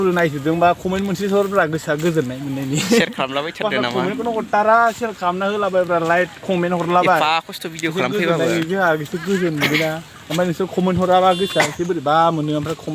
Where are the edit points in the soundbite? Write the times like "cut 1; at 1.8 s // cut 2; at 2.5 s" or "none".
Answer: none